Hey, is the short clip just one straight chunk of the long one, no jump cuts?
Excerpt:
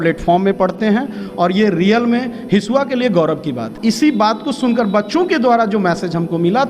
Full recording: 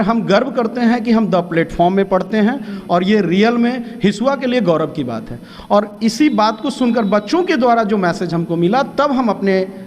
no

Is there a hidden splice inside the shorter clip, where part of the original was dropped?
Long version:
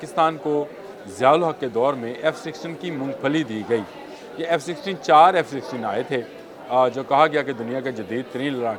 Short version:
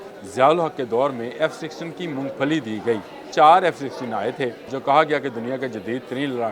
yes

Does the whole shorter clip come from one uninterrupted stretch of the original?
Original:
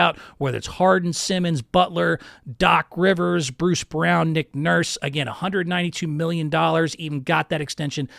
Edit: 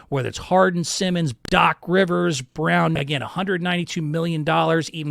no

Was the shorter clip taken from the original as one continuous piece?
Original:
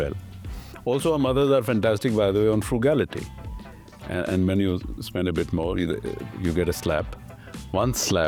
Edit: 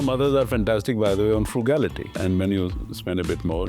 no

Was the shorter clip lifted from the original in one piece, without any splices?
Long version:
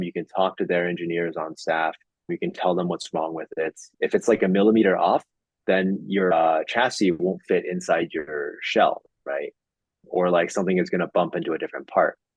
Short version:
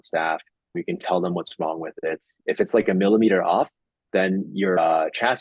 yes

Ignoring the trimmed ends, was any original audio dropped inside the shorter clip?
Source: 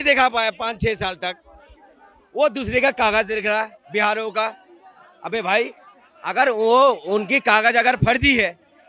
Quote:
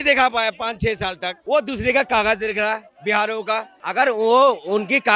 yes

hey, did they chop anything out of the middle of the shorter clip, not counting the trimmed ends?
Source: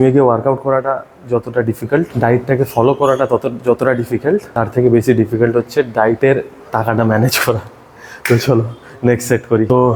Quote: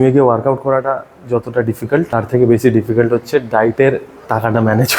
yes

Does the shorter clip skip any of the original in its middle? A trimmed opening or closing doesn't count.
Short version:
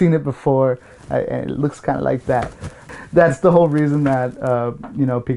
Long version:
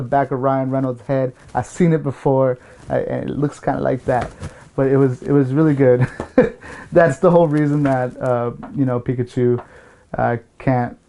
yes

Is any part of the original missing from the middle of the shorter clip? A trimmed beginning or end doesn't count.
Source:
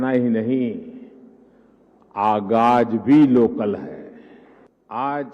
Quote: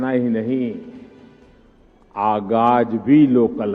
no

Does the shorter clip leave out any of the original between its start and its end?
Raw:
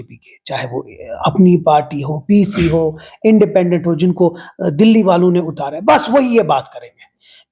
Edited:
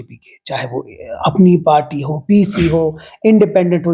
no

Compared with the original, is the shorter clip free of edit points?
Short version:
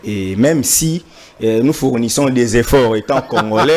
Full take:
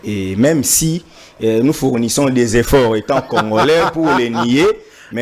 yes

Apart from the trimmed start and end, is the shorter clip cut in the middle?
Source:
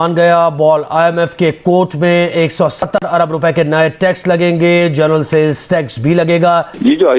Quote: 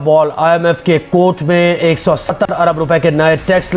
no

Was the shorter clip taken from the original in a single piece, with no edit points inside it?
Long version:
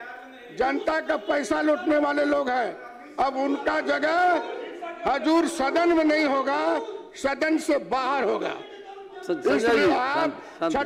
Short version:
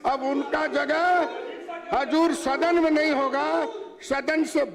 yes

